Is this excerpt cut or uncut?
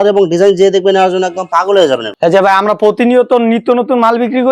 cut